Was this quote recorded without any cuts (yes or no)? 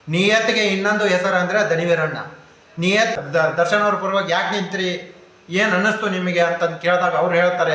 no